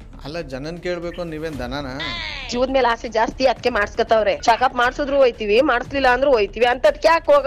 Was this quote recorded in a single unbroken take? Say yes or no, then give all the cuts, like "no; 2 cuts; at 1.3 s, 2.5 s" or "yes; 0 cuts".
no; 1 cut; at 4.4 s